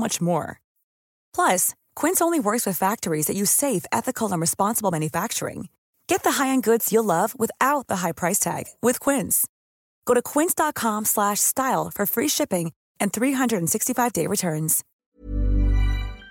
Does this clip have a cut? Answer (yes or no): yes